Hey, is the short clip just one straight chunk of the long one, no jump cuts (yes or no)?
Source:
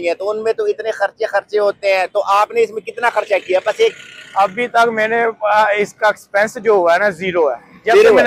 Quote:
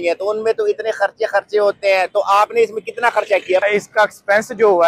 no